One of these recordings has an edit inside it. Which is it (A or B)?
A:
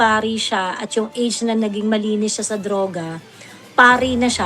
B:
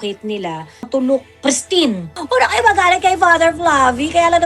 B